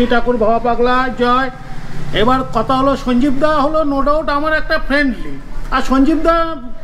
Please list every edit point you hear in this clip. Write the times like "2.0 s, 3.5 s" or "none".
none